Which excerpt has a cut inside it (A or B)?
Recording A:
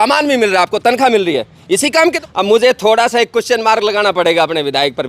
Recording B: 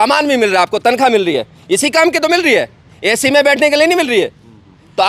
A